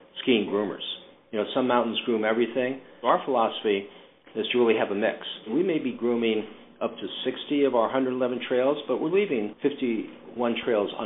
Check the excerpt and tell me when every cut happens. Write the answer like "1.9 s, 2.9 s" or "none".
3.0 s, 5.5 s, 9.8 s